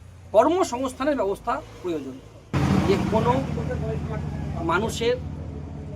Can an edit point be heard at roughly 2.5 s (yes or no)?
yes